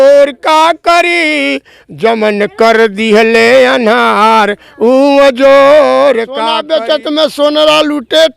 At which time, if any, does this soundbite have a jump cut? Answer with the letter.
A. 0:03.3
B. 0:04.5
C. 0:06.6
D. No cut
C